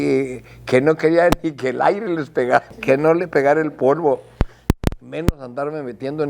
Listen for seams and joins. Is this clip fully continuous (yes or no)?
no